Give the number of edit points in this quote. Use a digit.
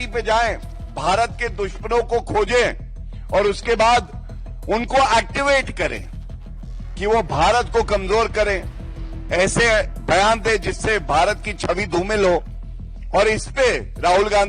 0